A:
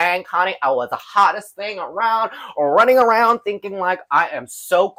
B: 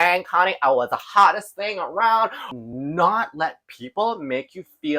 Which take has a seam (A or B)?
B